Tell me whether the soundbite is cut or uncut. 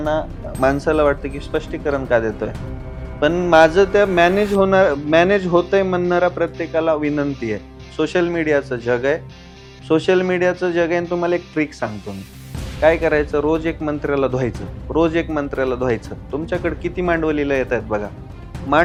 uncut